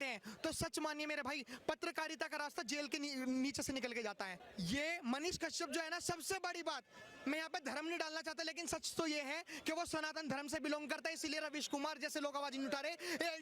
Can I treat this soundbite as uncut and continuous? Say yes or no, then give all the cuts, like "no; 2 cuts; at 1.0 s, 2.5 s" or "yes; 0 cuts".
no; 1 cut; at 4.3 s